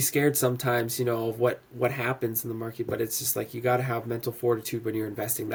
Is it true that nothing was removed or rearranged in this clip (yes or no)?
yes